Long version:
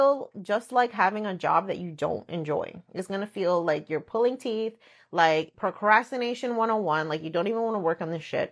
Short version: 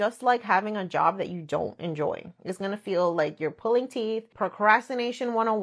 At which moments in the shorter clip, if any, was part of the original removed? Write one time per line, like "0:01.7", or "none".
0:04.3